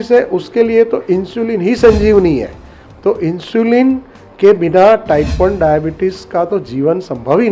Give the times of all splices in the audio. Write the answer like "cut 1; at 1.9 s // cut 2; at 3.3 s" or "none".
none